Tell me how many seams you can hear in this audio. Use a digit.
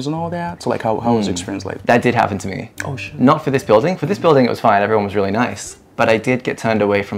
0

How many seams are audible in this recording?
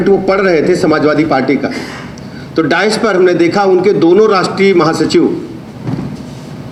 0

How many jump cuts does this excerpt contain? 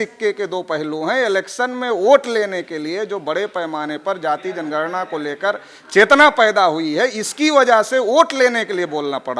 0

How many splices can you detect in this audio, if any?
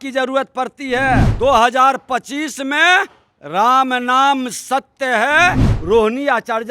2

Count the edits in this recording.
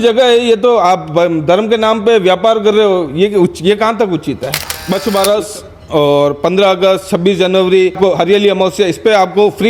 2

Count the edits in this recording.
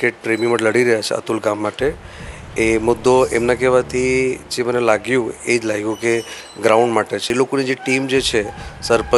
1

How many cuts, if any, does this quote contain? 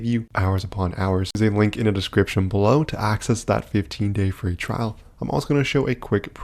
1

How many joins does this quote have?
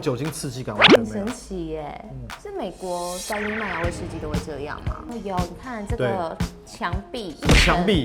1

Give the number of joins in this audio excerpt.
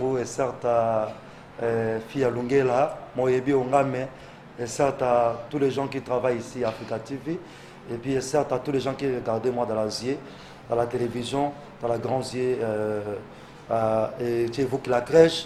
0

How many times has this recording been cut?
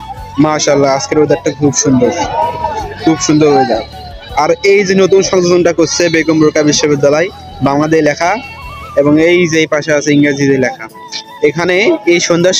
0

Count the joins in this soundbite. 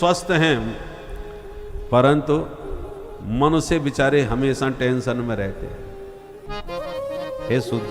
1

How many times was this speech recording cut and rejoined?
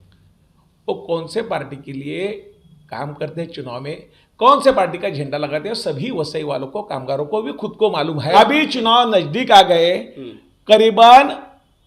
1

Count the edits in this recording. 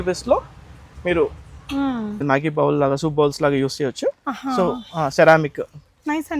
1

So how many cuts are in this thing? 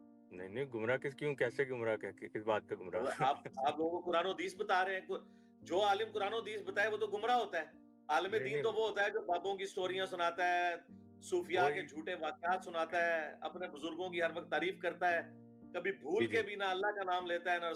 0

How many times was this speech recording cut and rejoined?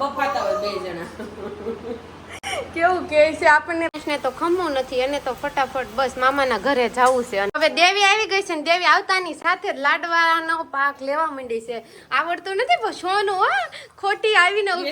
2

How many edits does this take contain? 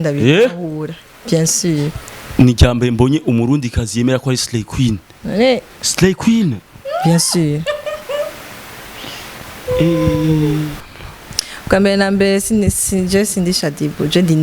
1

